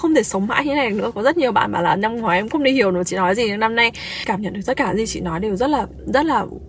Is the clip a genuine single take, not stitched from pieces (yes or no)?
no